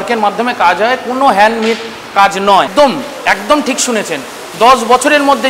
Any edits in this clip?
yes; 1 cut; at 2.7 s

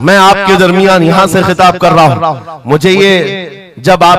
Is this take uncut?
yes; 0 cuts

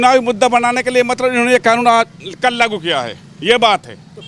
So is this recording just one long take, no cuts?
yes; 0 cuts

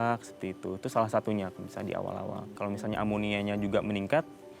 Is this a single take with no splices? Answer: no; 1 cut; at 2.5 s

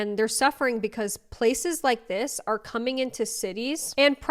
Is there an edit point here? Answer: no; 0 cuts

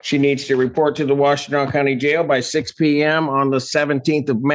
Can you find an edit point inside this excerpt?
no; 0 cuts

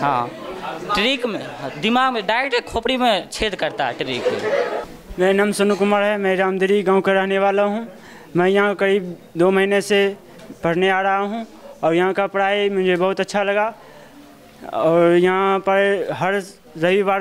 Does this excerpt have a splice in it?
no; 0 cuts

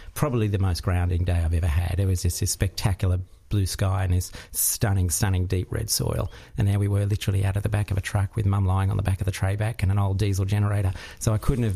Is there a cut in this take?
no; 0 cuts

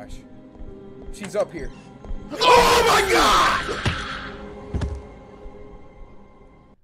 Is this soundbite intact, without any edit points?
yes; 0 cuts

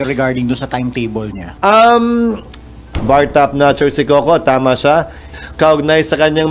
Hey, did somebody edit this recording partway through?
yes; 3 cuts; at 1.4 s, 2.9 s, 5.2 s

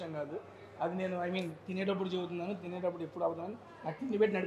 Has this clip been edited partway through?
no; 0 cuts

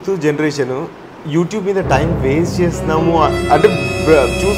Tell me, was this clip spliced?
no; 0 cuts

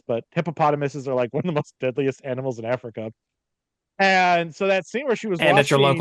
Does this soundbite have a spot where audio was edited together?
no; 0 cuts

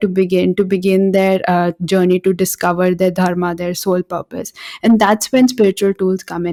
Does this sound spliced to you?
no; 0 cuts

